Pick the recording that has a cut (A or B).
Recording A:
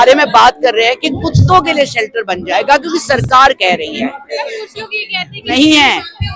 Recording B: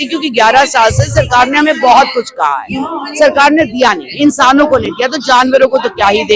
A